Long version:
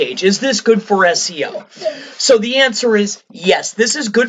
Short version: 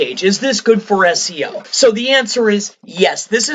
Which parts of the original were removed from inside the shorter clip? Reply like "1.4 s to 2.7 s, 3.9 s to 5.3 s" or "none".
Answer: 1.6 s to 2.1 s